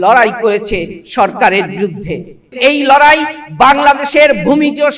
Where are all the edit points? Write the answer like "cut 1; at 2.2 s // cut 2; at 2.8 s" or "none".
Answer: cut 1; at 2.6 s